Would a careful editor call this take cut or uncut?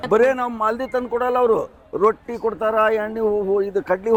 uncut